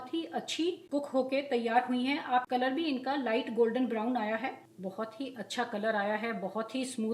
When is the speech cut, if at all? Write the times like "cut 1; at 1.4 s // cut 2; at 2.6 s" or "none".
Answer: cut 1; at 0.8 s // cut 2; at 2.5 s // cut 3; at 4.8 s